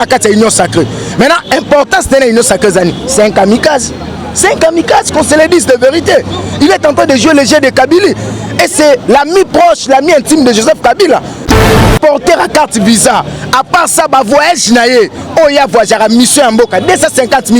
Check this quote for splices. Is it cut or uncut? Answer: cut